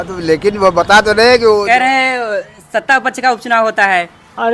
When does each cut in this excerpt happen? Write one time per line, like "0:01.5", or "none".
0:01.6